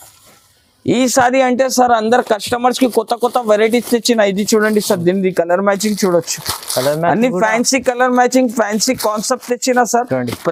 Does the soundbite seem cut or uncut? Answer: uncut